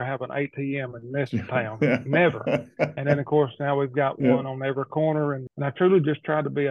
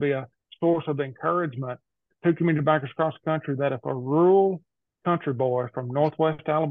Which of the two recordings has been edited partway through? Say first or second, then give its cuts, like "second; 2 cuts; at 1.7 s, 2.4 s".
first; 1 cut; at 5.5 s